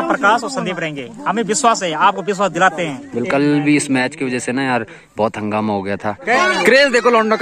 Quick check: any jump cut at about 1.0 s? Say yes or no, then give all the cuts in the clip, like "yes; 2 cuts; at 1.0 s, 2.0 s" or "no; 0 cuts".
no; 2 cuts; at 3.3 s, 6.4 s